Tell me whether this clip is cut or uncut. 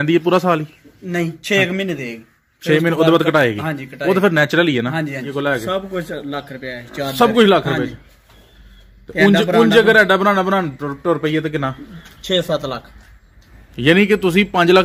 cut